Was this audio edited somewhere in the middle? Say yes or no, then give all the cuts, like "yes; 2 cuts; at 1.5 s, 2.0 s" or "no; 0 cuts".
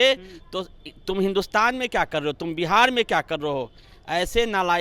no; 0 cuts